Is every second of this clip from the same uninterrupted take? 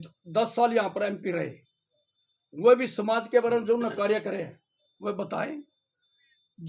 yes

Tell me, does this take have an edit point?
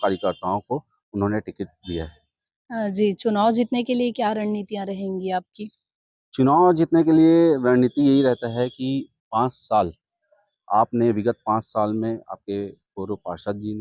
no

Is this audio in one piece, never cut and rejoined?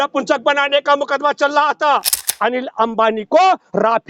no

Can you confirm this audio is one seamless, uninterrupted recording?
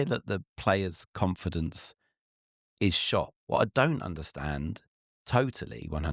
no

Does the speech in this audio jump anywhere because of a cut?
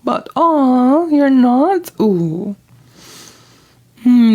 no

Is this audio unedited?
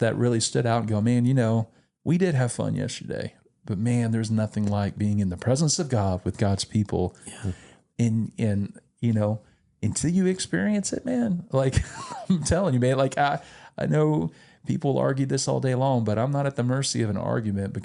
yes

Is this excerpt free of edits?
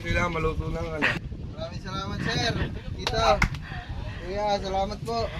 no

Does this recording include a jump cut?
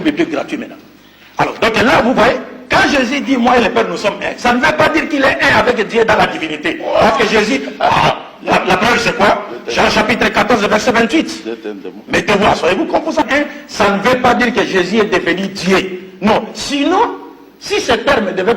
yes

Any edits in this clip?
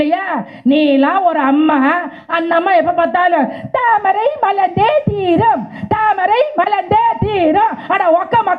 no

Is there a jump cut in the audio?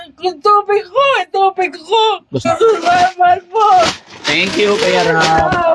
yes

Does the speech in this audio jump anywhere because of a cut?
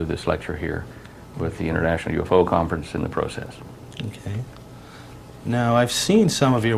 no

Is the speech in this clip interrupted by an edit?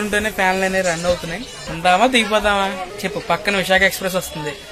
no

